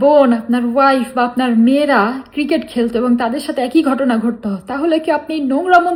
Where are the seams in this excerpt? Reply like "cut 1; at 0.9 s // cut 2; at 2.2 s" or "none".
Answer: none